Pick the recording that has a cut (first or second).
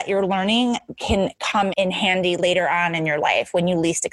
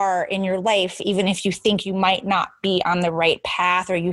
first